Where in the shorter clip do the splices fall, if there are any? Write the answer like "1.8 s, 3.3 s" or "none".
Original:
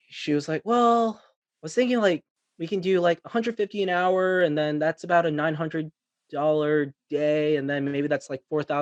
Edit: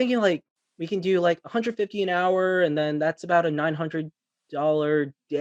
none